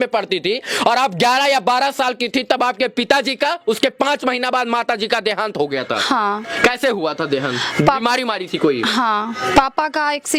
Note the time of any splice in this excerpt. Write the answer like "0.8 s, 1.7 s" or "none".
none